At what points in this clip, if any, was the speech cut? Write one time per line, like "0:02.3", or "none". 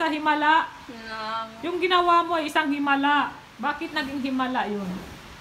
0:01.5
0:03.4